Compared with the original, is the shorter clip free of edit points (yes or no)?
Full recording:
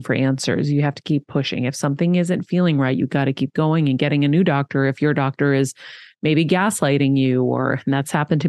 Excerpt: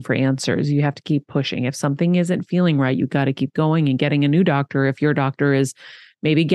yes